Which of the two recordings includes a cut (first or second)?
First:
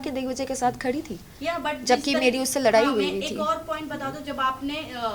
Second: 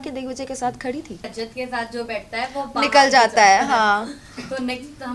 second